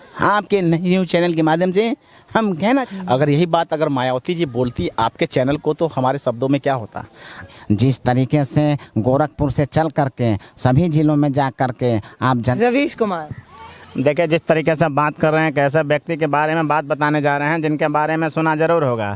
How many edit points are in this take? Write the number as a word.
three